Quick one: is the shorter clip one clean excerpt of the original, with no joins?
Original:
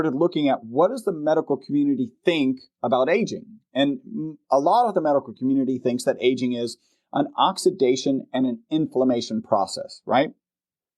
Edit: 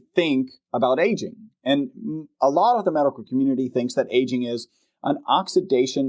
yes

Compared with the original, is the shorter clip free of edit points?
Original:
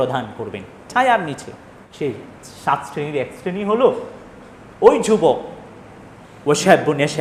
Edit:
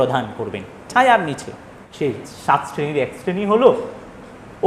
no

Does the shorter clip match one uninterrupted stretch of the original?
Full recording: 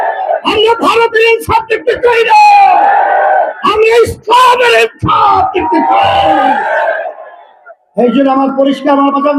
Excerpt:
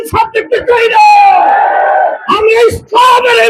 yes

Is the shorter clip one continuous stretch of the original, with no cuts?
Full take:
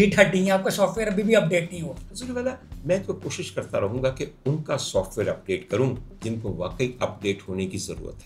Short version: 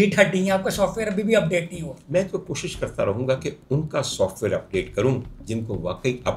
no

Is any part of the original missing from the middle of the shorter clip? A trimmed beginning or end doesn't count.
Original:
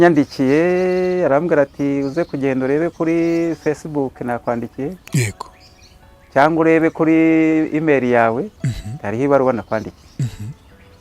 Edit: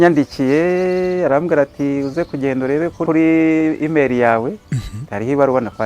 yes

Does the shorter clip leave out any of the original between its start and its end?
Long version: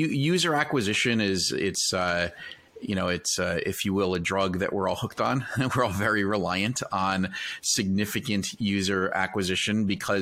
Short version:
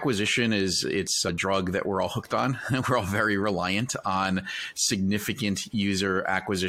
yes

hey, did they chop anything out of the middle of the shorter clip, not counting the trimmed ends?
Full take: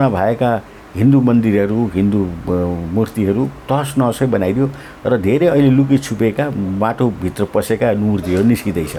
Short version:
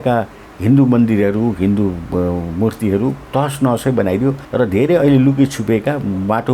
yes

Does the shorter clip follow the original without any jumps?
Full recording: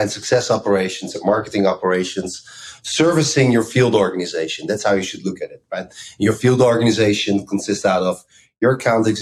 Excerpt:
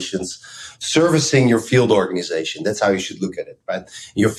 yes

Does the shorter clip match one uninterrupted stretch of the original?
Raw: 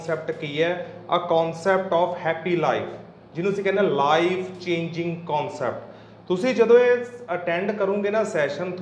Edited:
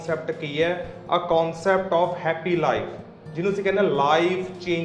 yes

